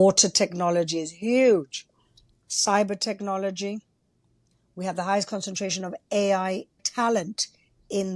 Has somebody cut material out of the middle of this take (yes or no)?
yes